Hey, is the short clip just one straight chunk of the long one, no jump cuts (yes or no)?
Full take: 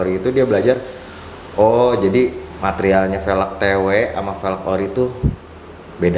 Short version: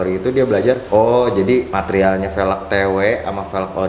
no